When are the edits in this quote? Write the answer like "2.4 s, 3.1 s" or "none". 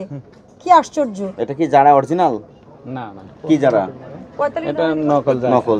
none